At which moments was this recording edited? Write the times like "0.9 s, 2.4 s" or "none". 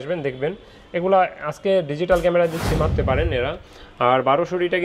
2.9 s

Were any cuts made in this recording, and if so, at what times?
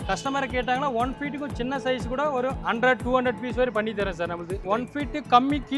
none

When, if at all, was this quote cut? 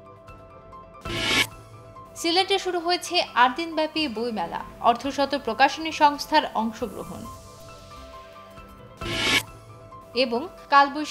0.9 s

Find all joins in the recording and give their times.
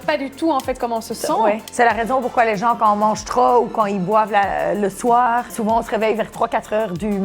1.7 s, 5.5 s

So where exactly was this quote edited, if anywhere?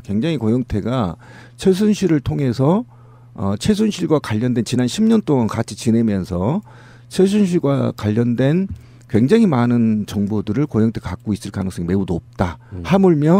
4.1 s

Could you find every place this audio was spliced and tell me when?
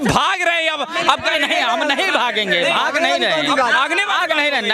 none

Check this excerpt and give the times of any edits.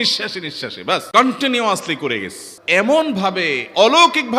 1.2 s, 2.6 s

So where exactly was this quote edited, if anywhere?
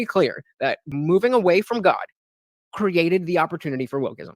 0.9 s

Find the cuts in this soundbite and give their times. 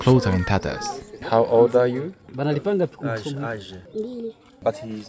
1.2 s, 3.7 s

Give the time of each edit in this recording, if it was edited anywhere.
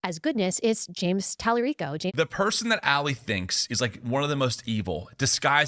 1.9 s

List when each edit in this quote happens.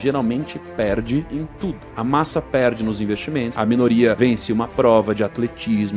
1.6 s, 3.5 s, 4.2 s

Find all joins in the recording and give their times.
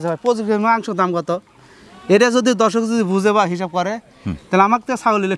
none

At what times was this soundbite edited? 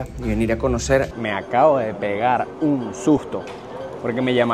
1.1 s

